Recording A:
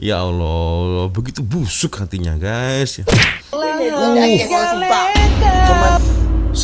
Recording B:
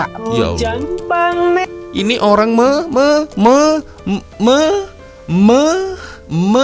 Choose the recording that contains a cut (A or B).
A